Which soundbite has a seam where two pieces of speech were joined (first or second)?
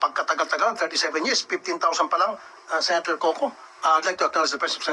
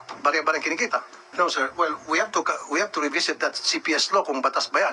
second